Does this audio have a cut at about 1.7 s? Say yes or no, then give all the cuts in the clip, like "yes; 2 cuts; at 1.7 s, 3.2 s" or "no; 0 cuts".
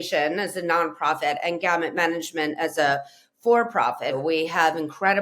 no; 1 cut; at 4.2 s